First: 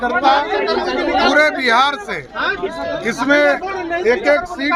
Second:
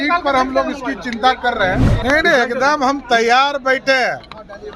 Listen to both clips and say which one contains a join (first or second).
second